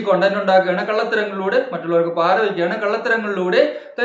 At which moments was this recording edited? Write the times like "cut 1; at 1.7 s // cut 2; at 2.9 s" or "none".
none